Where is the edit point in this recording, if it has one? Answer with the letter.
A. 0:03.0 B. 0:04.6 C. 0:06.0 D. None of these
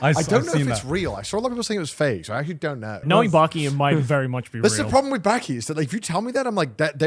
A